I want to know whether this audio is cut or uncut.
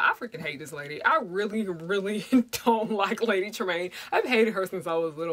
uncut